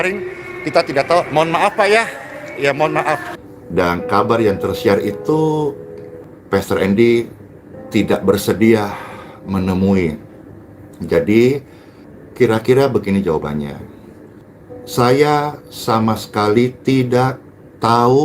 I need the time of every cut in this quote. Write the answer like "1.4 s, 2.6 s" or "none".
3.4 s